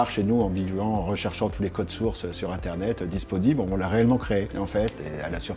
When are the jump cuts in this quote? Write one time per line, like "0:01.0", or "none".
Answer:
none